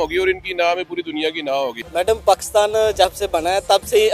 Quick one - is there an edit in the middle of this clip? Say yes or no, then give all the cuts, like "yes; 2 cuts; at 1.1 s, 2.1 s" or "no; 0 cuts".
yes; 1 cut; at 1.8 s